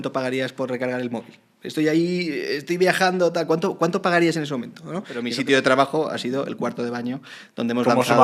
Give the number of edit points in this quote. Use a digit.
1